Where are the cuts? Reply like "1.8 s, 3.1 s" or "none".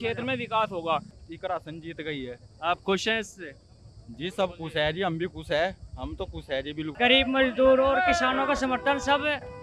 1.2 s, 6.9 s